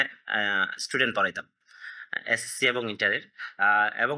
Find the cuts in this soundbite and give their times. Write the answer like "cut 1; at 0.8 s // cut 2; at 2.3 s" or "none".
none